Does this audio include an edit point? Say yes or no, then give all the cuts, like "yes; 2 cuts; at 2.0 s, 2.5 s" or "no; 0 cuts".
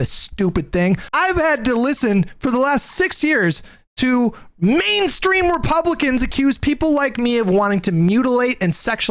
yes; 1 cut; at 1.1 s